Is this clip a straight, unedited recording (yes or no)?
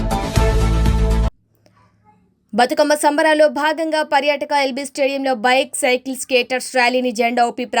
no